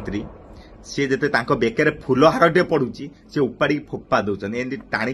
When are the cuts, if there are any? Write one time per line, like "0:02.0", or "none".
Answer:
none